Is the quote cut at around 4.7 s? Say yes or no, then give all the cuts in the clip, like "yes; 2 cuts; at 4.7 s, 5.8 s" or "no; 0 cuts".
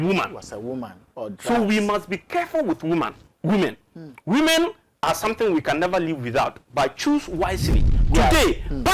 no; 1 cut; at 7.9 s